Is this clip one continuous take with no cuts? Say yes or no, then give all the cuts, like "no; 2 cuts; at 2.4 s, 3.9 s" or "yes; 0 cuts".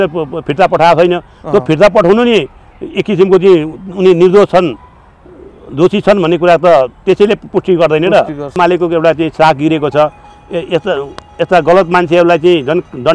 no; 1 cut; at 8.6 s